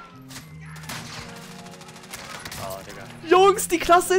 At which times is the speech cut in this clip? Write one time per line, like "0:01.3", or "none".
none